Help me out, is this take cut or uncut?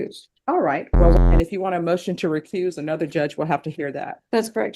cut